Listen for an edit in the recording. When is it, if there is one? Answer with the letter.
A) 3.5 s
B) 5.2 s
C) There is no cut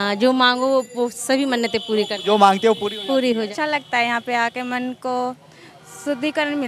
A